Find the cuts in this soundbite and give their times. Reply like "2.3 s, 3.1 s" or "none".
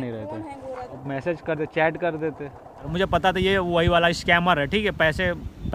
0.9 s, 2.9 s